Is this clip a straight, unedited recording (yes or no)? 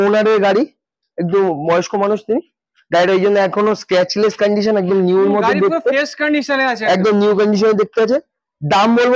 yes